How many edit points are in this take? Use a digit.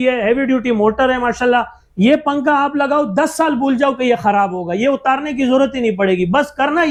0